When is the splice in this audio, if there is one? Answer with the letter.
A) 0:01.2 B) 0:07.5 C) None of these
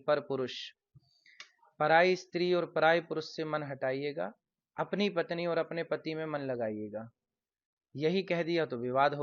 C